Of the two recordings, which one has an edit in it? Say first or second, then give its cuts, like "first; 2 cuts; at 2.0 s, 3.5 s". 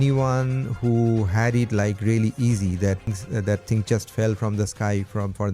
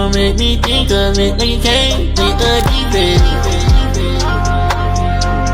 first; 1 cut; at 3.1 s